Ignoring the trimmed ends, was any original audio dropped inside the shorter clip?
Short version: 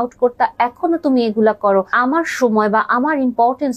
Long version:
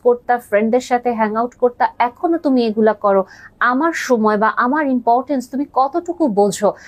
yes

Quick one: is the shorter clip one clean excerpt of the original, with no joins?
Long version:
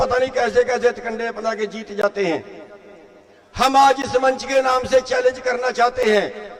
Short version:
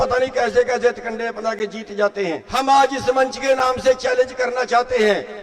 no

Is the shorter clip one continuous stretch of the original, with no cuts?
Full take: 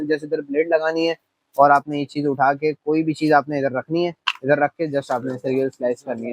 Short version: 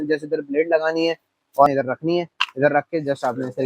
no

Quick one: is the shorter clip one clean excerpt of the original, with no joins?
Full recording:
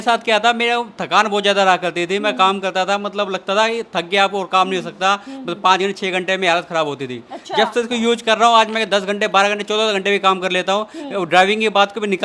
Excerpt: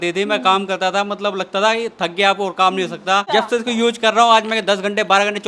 no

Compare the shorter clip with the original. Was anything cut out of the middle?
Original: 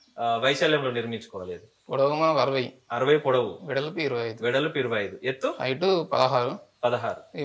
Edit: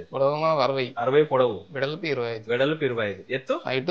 yes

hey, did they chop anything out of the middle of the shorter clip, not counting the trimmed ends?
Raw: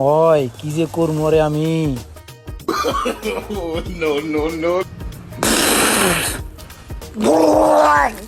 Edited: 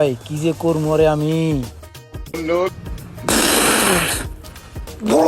yes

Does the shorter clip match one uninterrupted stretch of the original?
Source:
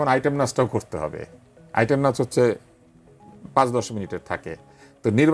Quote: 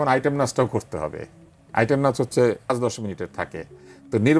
no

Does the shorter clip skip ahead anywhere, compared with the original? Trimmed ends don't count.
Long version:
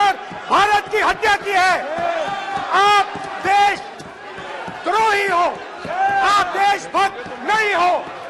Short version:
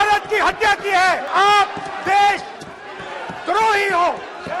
yes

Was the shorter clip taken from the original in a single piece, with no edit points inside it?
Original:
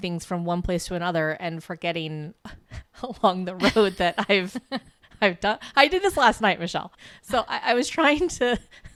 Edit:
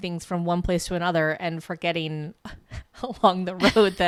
yes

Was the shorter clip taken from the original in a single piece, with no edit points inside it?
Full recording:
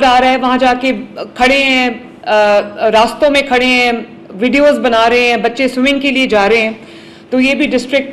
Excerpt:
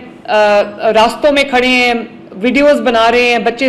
yes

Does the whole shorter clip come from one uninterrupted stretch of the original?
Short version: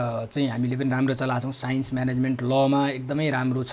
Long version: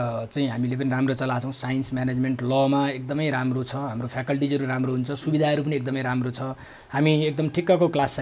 yes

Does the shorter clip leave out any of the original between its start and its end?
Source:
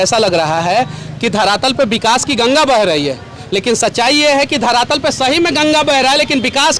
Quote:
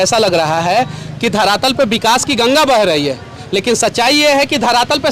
no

